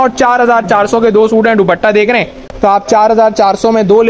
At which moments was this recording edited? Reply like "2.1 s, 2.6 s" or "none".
2.4 s